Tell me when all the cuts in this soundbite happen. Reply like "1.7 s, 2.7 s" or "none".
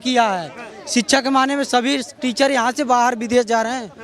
none